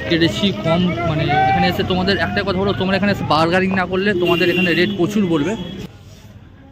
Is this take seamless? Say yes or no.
no